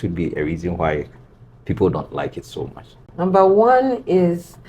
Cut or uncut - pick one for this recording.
cut